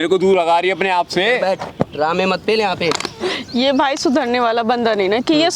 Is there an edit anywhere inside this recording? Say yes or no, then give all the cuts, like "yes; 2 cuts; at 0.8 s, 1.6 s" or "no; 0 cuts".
no; 0 cuts